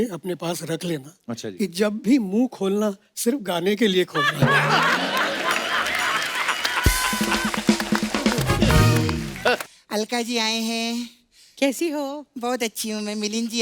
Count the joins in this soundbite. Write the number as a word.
one